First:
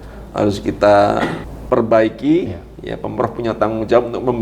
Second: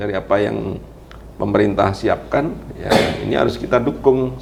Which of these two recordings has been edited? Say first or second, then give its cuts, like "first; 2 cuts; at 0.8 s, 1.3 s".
first; 1 cut; at 1.5 s